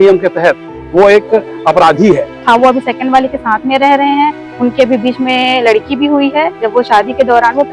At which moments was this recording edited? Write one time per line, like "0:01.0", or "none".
0:02.4
0:06.6